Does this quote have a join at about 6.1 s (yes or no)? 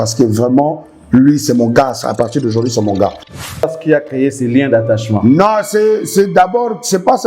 no